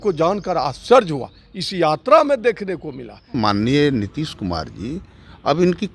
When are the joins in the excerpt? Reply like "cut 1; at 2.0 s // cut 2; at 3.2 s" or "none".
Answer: cut 1; at 3.3 s